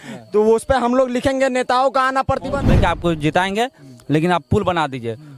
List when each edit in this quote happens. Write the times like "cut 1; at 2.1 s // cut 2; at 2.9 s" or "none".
cut 1; at 2.6 s